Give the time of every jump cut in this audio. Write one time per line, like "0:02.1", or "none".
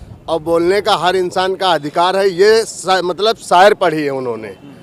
none